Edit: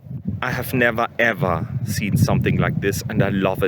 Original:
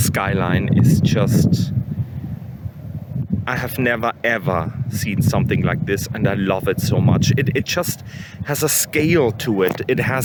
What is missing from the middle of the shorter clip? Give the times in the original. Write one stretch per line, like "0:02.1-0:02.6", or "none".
none